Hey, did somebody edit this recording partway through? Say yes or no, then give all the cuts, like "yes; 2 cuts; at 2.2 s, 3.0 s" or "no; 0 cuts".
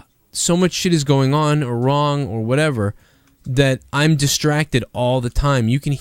no; 0 cuts